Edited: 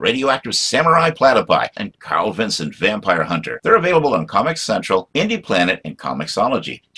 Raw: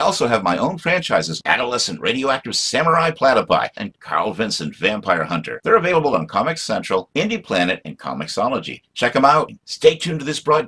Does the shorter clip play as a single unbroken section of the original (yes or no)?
yes